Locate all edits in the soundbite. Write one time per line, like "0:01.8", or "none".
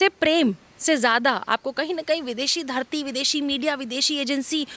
none